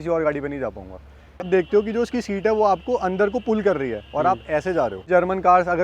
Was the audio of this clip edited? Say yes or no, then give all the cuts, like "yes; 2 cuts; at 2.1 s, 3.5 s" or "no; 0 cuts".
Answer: yes; 2 cuts; at 1.5 s, 5.0 s